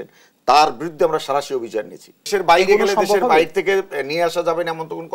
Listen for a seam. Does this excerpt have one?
yes; 1 cut; at 2.2 s

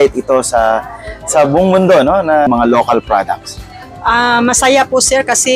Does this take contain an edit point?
yes; 1 cut; at 2.5 s

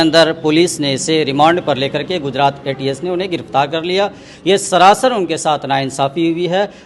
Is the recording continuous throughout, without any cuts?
yes; 0 cuts

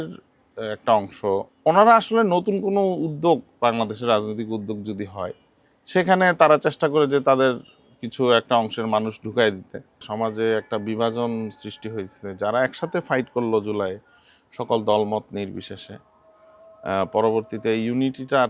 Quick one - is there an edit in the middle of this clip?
yes; 2 cuts; at 1.5 s, 10.0 s

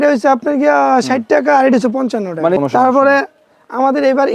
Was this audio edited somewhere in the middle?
no; 0 cuts

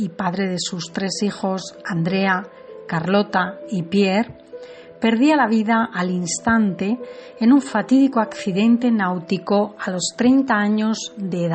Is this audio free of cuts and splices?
yes; 0 cuts

